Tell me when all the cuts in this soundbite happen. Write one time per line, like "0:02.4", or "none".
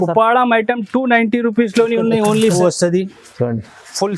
0:02.6